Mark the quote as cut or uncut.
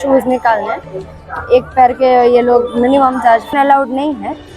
cut